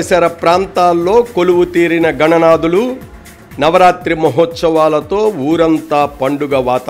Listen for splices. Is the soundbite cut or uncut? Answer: uncut